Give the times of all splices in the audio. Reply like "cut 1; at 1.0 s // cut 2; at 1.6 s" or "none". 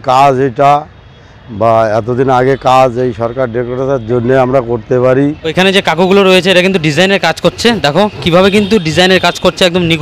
cut 1; at 5.4 s